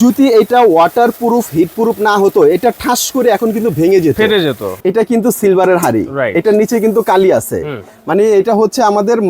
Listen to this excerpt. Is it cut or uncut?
cut